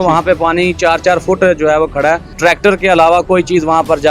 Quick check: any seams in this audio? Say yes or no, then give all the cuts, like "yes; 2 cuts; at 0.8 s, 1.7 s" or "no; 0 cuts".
yes; 1 cut; at 2.3 s